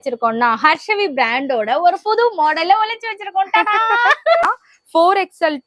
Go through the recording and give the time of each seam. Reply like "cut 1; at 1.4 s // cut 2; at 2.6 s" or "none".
cut 1; at 4.4 s